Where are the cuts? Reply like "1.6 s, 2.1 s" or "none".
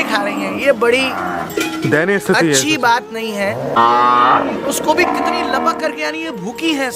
3.8 s

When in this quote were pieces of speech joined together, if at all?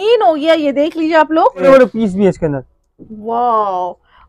1.6 s

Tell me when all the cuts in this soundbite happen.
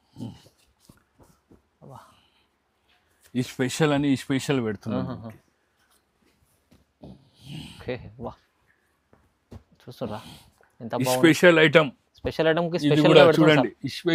none

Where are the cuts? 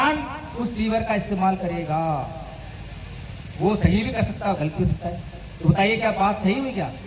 none

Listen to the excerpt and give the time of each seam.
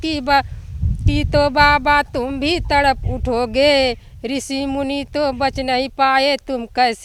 none

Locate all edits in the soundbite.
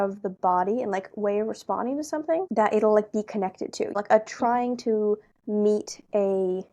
2.5 s, 3.9 s

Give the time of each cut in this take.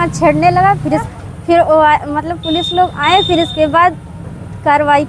1.1 s

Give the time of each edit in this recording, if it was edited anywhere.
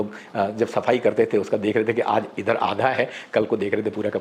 none

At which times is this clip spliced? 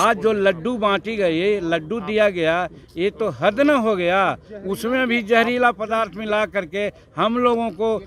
none

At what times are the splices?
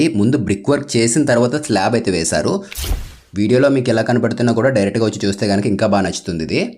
2.8 s

